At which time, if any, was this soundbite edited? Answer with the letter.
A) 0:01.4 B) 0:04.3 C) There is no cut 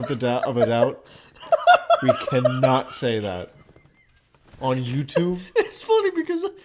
C